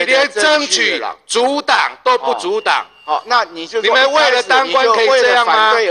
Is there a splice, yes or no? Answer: no